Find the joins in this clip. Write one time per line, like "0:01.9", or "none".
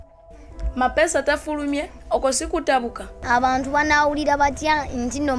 0:03.1